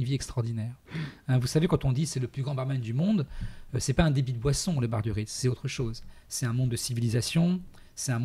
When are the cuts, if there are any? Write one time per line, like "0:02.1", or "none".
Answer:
none